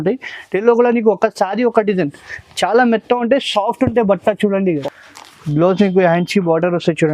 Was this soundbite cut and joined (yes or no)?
yes